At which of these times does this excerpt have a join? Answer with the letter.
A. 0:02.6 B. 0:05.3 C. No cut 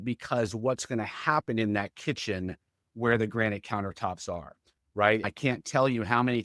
B